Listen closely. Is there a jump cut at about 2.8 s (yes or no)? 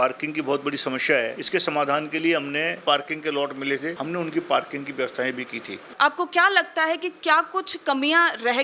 yes